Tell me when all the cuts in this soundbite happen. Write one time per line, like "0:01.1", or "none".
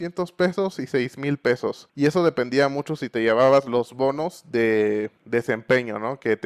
0:01.8
0:05.2